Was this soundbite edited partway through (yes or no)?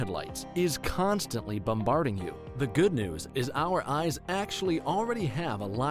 no